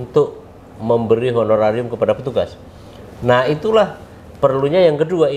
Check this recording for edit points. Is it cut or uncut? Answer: uncut